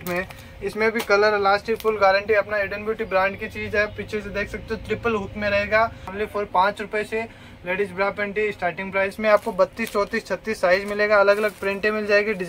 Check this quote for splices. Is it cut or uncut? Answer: cut